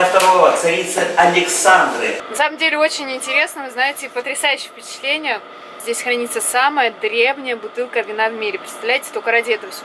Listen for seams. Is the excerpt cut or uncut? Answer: cut